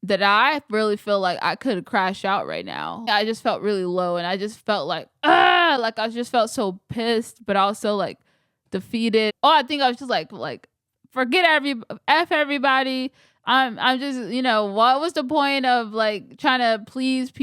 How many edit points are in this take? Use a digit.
2